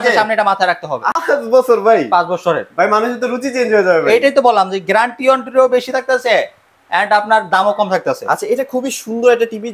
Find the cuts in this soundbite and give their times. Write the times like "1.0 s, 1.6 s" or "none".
1.0 s